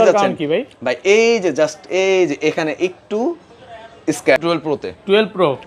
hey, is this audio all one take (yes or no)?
no